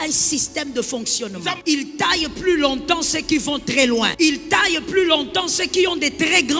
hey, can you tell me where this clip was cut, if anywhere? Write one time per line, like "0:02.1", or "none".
0:01.6
0:04.1